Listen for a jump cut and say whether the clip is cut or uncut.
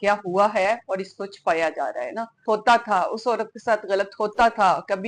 cut